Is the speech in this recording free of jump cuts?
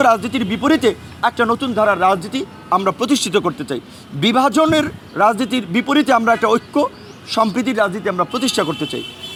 yes; 0 cuts

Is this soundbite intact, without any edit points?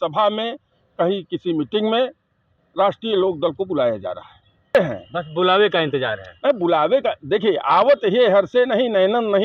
no; 1 cut; at 4.8 s

